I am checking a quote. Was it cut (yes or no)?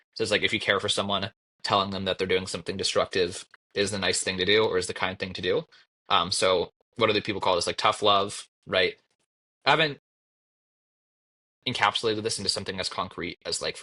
yes